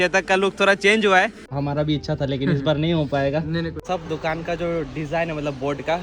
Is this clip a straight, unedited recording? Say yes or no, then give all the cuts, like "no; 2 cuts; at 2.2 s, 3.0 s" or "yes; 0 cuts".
no; 2 cuts; at 1.5 s, 3.8 s